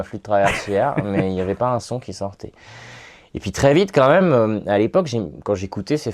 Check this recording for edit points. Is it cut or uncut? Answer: uncut